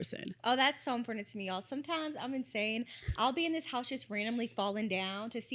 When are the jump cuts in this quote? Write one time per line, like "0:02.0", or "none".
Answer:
none